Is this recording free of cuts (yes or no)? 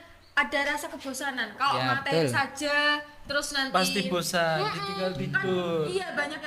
yes